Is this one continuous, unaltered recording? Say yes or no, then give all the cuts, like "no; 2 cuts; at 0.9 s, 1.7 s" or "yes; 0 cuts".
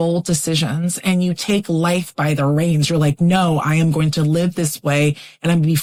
yes; 0 cuts